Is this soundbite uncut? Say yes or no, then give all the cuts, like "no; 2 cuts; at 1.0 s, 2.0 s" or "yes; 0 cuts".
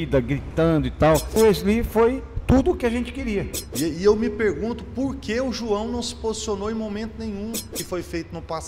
no; 3 cuts; at 1.4 s, 3.6 s, 7.7 s